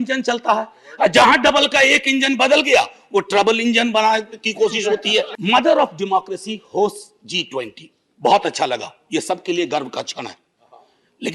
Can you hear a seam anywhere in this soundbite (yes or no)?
yes